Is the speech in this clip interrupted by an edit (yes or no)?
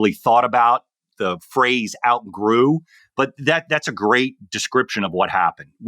yes